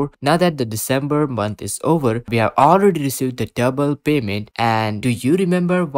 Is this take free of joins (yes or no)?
no